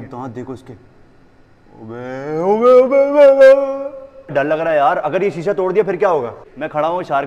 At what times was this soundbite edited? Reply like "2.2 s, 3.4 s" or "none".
none